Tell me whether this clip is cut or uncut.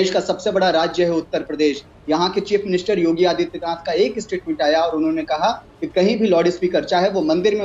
uncut